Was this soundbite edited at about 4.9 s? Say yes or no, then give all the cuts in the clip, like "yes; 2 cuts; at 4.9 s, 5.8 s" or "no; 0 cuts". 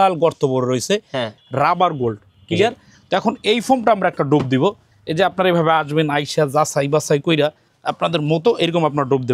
no; 1 cut; at 1.3 s